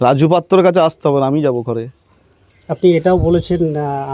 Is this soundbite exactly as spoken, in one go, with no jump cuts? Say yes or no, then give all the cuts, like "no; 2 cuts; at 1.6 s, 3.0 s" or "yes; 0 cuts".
yes; 0 cuts